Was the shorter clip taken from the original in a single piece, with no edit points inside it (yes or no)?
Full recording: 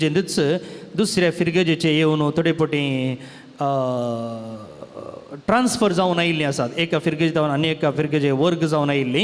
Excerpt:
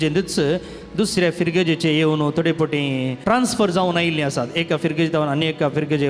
no